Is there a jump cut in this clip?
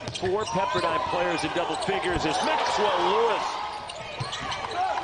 no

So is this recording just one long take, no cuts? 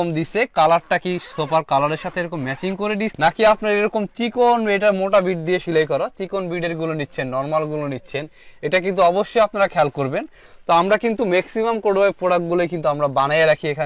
yes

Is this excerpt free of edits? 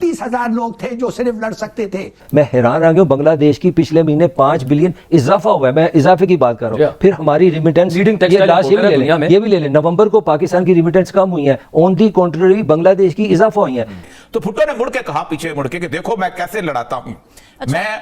no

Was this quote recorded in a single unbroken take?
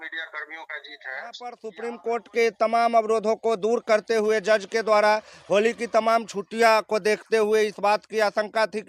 no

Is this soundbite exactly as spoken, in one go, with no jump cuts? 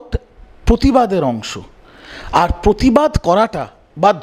yes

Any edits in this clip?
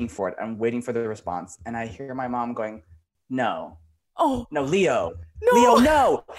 no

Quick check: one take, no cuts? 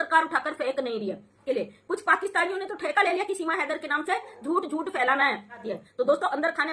no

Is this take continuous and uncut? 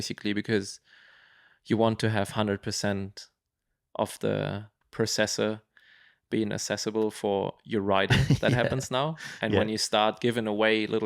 no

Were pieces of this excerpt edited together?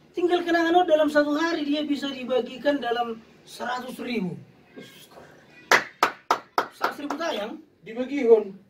no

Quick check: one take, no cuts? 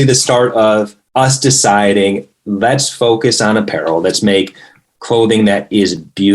no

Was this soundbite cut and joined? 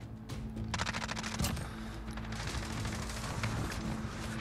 no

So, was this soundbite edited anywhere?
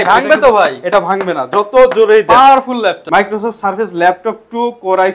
yes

